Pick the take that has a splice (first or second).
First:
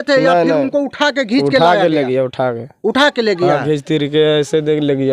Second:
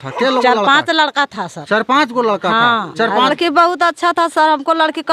second